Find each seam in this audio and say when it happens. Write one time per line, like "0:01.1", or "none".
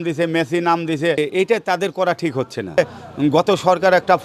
0:01.2
0:02.8